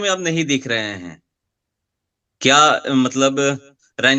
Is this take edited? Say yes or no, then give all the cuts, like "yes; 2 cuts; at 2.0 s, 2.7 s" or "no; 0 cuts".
no; 0 cuts